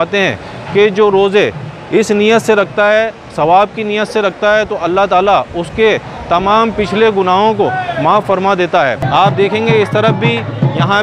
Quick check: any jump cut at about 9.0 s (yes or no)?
yes